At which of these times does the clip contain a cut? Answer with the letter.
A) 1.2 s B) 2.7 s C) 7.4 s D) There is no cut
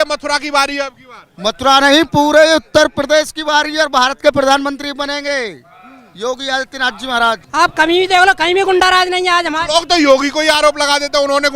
C